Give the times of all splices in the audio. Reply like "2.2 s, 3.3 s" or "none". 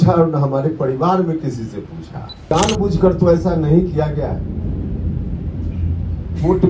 2.5 s